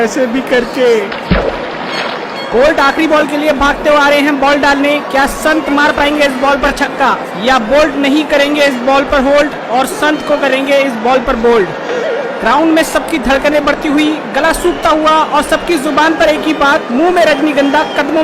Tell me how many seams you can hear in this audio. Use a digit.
0